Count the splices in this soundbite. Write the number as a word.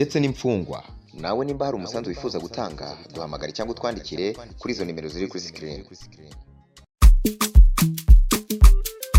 zero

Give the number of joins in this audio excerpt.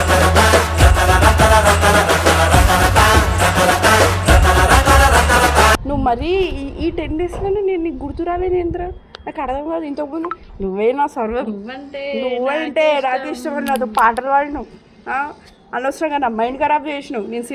one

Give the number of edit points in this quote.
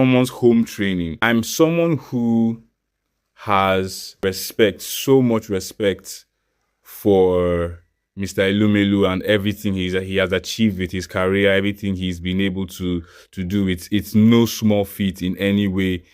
one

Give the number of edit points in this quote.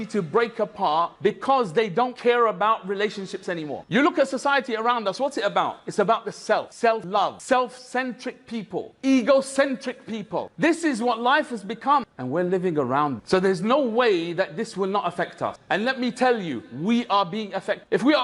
zero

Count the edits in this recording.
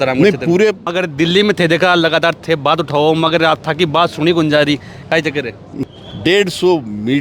two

